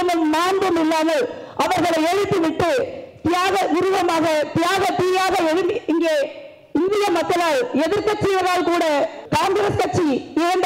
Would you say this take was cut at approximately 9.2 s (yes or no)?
yes